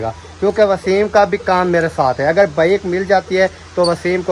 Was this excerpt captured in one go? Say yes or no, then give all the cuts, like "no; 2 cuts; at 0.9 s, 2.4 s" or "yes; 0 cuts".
yes; 0 cuts